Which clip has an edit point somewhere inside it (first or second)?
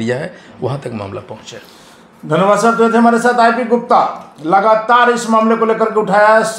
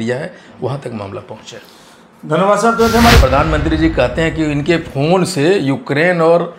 second